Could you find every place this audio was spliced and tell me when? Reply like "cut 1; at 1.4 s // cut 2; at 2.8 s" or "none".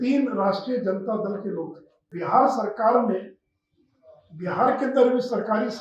cut 1; at 2.1 s